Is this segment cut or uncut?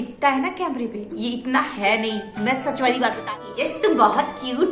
cut